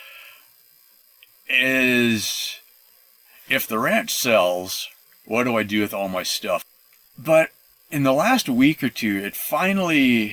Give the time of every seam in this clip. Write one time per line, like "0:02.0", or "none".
0:06.7